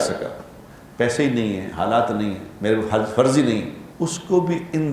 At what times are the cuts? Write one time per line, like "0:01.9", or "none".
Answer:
0:03.8